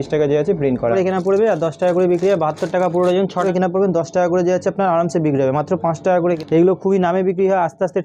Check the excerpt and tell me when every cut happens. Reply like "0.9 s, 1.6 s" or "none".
0.9 s, 3.4 s, 6.4 s